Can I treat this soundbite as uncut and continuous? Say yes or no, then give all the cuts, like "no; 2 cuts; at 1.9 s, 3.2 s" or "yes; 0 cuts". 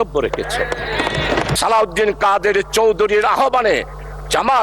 no; 1 cut; at 1.6 s